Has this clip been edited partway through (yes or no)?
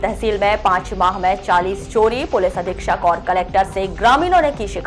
no